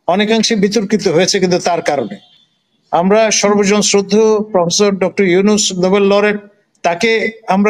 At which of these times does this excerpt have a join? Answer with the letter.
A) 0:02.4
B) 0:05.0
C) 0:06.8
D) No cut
D